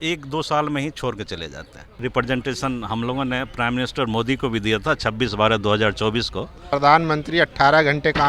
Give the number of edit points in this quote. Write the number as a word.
two